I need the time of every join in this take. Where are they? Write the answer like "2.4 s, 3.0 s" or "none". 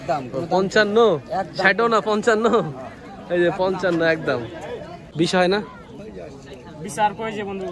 5.0 s